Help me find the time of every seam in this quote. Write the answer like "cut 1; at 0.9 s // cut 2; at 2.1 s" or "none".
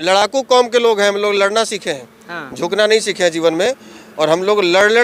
none